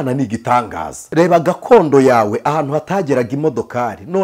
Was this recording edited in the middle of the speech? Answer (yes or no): yes